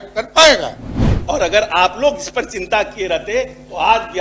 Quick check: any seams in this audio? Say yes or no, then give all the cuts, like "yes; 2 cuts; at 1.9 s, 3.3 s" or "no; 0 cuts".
yes; 1 cut; at 1.1 s